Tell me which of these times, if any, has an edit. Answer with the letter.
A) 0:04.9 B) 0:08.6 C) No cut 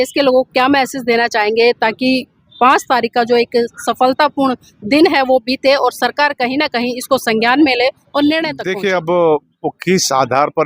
B